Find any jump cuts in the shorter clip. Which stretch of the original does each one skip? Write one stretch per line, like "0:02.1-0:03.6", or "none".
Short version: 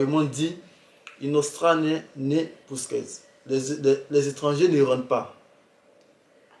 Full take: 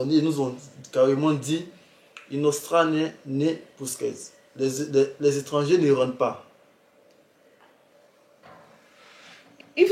none